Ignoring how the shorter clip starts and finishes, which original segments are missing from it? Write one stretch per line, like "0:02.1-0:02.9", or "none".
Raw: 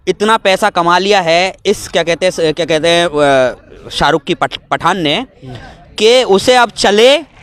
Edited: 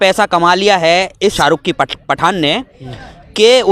0:01.8-0:04.0